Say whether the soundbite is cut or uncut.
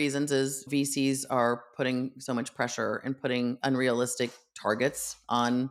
uncut